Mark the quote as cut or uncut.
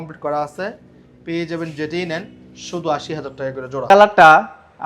cut